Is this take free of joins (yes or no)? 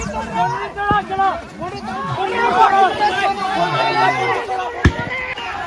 yes